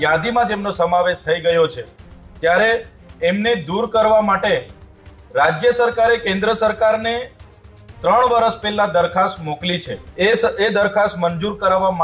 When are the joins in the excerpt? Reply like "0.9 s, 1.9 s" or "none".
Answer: 10.0 s